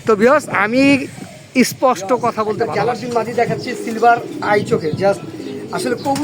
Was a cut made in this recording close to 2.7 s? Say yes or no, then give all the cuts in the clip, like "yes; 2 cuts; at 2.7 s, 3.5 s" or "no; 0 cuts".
yes; 1 cut; at 2.7 s